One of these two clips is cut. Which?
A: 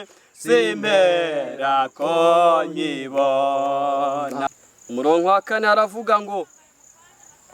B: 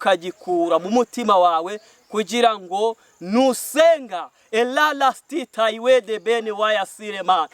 A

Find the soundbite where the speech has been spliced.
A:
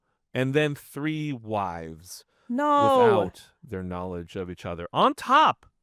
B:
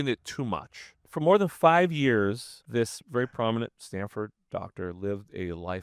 B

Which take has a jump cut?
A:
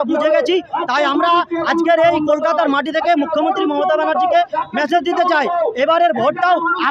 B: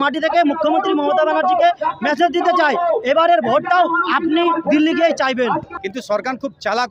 B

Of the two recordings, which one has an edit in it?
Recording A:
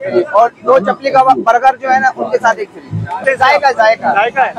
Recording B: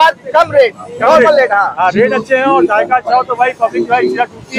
A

